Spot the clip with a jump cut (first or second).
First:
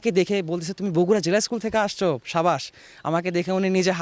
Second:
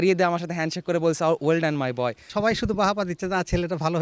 second